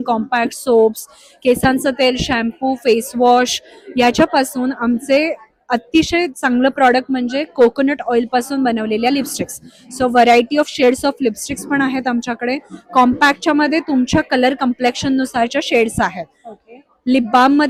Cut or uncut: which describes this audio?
uncut